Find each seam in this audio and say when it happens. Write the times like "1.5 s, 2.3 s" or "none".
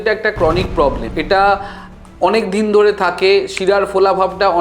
1.1 s